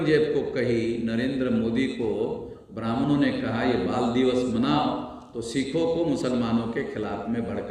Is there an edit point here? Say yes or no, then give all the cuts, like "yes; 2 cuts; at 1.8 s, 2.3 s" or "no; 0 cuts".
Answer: no; 0 cuts